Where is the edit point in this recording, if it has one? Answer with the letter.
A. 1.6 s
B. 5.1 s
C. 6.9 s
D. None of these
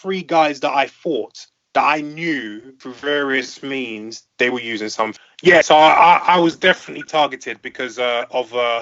B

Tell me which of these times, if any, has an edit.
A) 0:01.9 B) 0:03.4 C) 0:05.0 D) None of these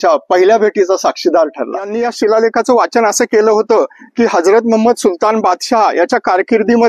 A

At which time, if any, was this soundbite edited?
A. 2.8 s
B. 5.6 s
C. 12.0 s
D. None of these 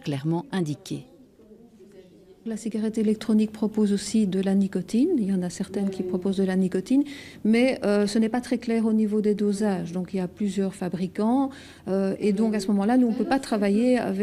D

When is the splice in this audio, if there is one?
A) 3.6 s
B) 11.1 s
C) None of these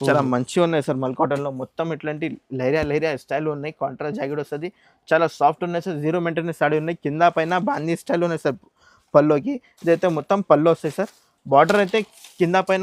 C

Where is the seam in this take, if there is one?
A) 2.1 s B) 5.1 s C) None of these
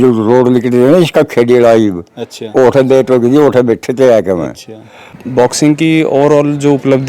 B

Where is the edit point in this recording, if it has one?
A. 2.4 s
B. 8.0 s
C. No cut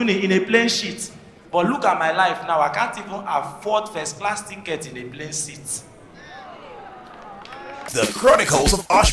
B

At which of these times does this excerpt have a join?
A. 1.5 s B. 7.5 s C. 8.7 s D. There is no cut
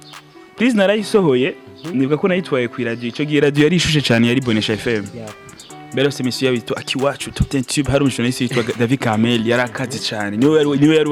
D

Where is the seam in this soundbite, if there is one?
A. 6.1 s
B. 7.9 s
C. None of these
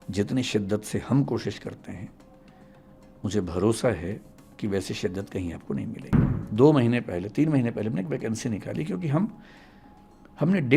A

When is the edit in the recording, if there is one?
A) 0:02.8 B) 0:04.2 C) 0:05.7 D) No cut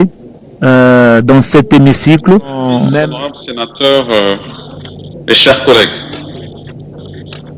A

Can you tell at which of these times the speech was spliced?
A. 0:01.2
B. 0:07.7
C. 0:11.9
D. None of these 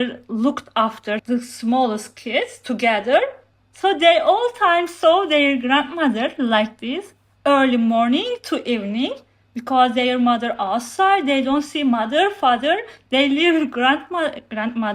A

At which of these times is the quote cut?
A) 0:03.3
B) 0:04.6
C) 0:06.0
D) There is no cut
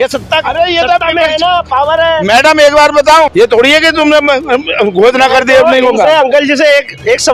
A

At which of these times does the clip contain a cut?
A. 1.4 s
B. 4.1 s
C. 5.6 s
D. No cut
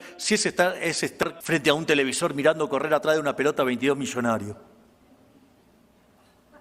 A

